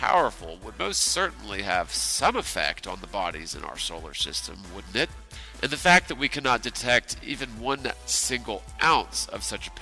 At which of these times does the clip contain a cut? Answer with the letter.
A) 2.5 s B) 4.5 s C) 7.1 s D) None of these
D